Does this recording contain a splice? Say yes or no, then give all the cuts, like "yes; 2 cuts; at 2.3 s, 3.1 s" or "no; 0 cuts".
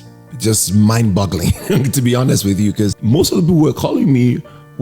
yes; 1 cut; at 3.0 s